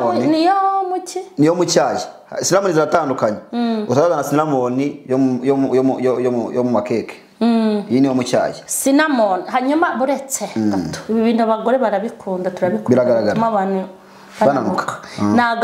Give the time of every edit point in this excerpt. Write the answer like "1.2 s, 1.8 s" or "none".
none